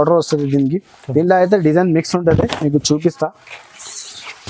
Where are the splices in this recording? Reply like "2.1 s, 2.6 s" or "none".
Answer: none